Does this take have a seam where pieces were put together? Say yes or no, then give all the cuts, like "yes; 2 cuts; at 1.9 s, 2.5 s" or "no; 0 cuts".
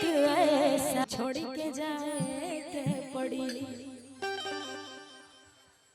yes; 1 cut; at 1.1 s